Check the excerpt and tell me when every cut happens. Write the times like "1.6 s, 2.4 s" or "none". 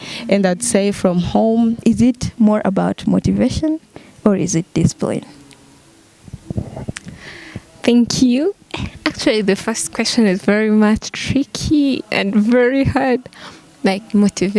1.8 s